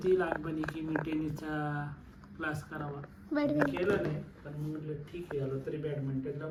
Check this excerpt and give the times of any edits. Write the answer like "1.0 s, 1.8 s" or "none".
none

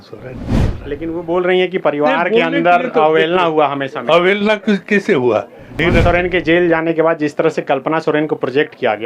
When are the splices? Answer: 5.7 s

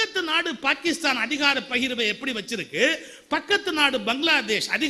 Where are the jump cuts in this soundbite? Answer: none

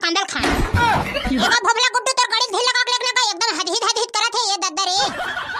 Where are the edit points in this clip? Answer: 1.4 s

